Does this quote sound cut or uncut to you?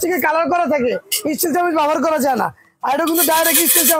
uncut